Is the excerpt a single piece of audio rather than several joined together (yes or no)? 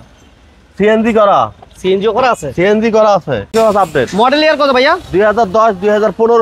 no